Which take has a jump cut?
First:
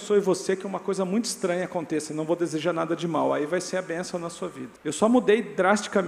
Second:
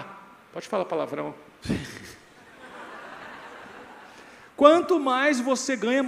first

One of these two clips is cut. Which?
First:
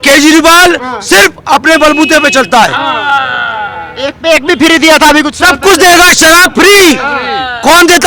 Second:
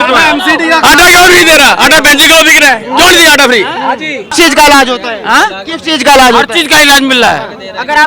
second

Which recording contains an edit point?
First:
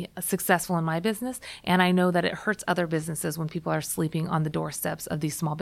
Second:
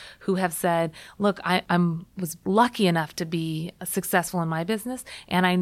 second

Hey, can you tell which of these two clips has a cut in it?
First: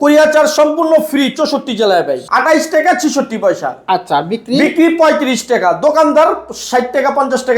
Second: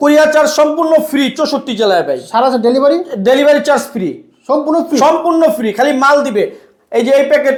first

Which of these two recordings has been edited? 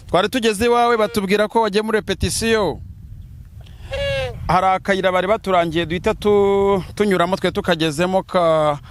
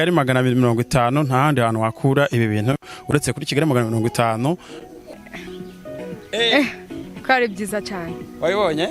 second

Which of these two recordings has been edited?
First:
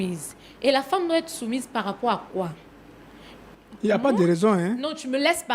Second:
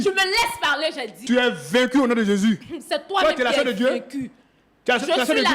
second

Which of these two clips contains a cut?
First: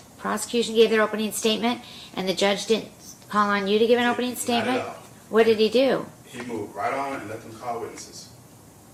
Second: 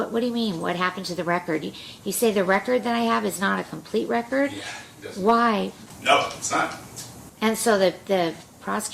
second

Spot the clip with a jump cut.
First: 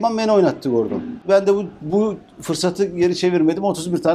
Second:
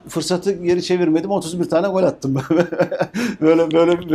first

